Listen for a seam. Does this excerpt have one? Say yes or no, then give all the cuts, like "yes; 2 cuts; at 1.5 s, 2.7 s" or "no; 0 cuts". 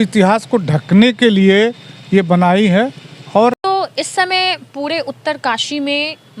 yes; 1 cut; at 3.6 s